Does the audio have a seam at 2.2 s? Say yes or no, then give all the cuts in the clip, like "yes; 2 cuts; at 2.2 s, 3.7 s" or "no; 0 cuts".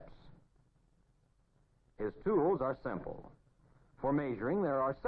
no; 1 cut; at 4.1 s